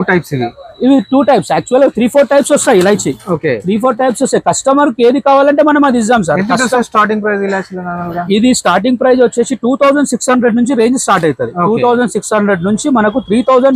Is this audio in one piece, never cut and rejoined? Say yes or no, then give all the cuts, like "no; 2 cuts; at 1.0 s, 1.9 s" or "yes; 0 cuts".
yes; 0 cuts